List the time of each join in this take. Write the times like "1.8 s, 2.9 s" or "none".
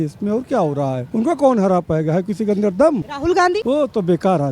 1.0 s, 3.4 s